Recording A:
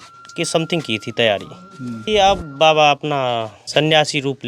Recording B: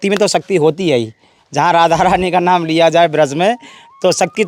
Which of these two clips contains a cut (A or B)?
A